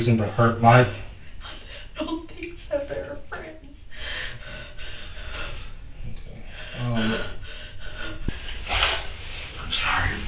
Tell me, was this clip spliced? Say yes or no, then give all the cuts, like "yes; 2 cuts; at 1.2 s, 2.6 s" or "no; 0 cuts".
yes; 1 cut; at 8.4 s